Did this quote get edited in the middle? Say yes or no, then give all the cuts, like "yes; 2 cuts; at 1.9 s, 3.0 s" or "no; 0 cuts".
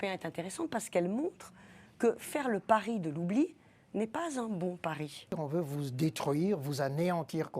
yes; 1 cut; at 5.4 s